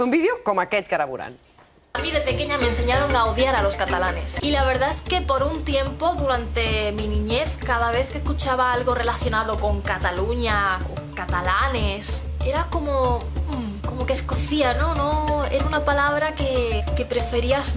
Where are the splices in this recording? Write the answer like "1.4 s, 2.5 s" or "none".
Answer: 1.3 s